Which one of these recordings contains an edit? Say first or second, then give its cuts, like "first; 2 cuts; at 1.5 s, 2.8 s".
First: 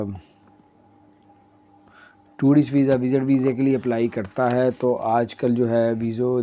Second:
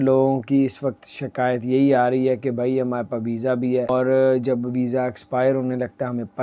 second; 1 cut; at 3.9 s